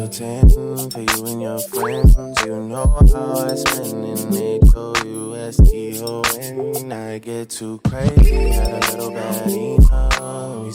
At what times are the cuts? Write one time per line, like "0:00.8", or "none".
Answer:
none